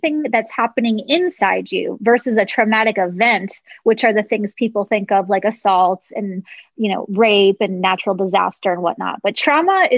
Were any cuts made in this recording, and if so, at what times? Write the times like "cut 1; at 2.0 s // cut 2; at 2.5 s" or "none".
none